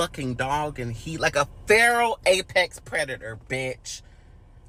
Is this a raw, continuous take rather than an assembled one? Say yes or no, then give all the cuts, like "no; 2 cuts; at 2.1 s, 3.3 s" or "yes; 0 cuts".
yes; 0 cuts